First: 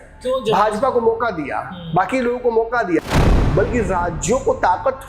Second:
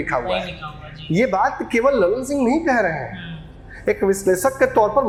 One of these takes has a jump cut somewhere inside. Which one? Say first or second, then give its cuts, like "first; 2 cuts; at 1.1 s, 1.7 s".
first; 1 cut; at 3.2 s